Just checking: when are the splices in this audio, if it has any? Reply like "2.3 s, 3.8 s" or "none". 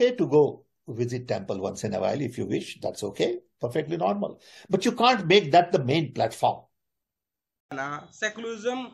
7.8 s